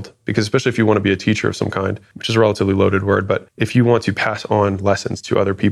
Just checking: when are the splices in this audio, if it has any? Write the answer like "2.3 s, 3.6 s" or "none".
3.5 s